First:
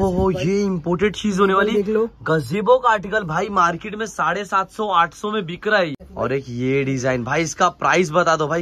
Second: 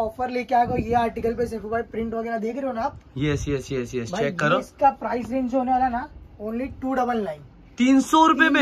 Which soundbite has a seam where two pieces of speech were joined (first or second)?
first